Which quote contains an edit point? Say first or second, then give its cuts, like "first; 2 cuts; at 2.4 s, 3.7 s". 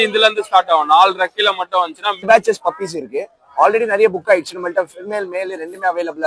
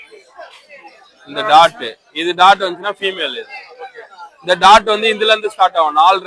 first; 1 cut; at 2.3 s